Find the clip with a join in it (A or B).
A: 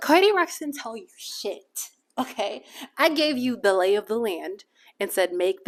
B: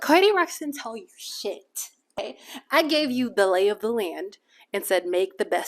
B